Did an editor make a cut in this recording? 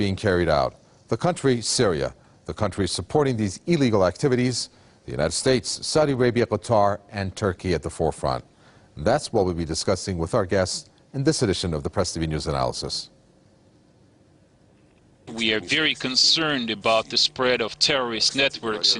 yes; 1 cut; at 1.7 s

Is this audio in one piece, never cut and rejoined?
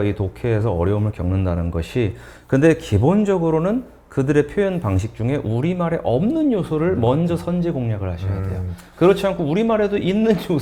yes; 0 cuts

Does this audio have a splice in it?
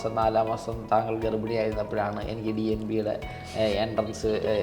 no; 0 cuts

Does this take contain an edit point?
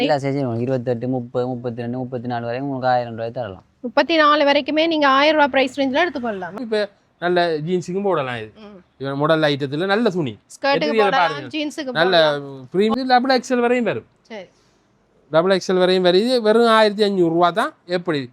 yes; 2 cuts; at 6.6 s, 12.9 s

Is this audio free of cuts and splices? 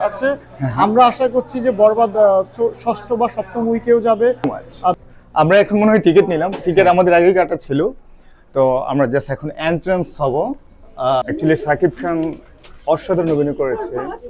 no; 2 cuts; at 5.0 s, 11.2 s

